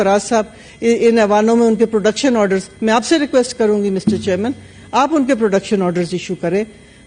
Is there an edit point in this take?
no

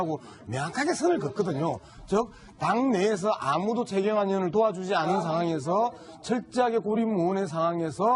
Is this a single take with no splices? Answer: no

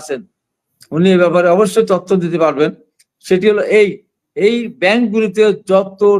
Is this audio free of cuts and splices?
yes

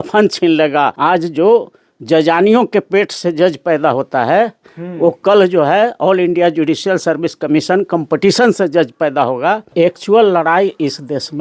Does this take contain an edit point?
yes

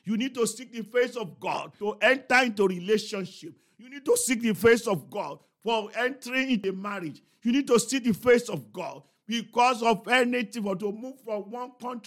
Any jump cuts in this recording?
yes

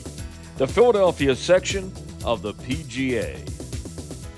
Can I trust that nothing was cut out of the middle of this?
no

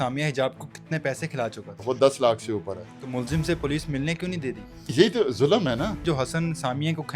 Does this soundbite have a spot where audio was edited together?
yes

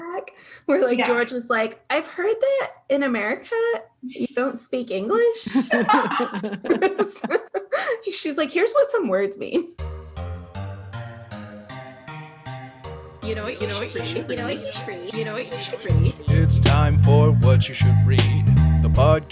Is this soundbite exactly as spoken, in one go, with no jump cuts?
no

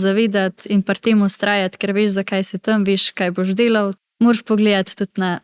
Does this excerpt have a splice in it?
yes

